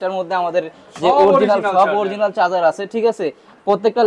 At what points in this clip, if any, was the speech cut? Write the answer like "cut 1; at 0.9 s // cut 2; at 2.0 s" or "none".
none